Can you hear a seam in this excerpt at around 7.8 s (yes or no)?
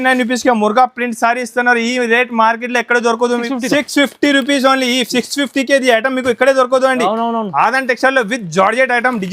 no